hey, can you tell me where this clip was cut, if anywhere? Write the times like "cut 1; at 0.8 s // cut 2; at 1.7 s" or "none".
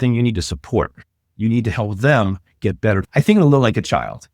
cut 1; at 3.0 s